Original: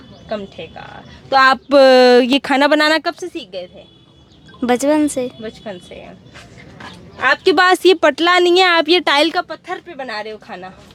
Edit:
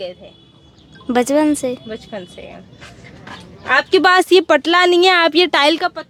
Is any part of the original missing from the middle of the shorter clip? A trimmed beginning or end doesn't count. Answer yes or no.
no